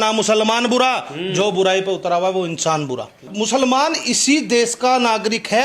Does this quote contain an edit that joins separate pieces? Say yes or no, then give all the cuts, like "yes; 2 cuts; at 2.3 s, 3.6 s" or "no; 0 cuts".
yes; 1 cut; at 3.3 s